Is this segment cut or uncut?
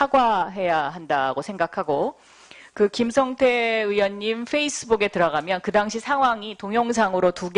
cut